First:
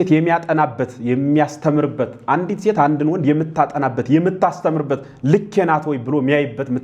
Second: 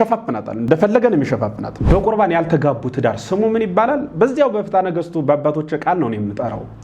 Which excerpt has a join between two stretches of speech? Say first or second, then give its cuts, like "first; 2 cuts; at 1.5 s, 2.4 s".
second; 2 cuts; at 0.7 s, 1.7 s